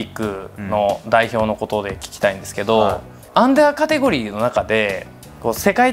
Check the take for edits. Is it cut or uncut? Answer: uncut